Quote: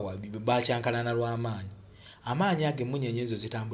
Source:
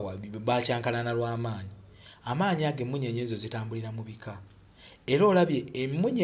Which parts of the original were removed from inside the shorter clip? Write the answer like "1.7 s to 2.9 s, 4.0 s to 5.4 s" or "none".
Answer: none